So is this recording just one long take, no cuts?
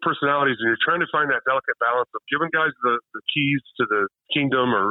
yes; 0 cuts

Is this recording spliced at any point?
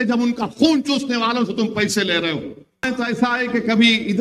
yes; 1 cut; at 2.9 s

